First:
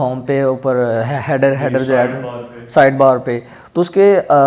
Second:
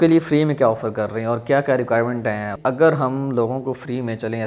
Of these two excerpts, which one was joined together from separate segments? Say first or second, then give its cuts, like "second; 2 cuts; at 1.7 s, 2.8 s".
second; 1 cut; at 2.5 s